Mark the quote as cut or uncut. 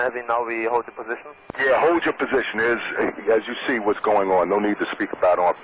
cut